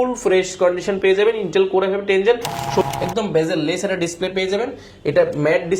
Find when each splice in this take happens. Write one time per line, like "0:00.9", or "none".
0:02.8